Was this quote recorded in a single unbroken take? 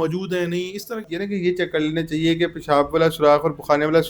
no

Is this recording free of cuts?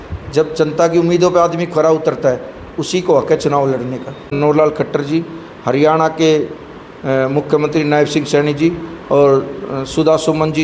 no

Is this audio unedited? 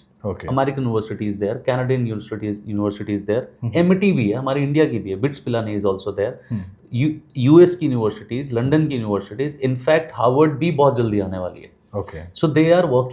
yes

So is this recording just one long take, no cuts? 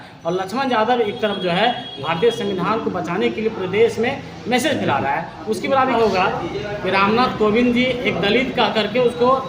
no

